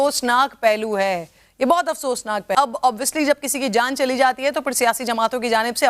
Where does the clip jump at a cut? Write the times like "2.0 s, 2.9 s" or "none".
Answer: 2.5 s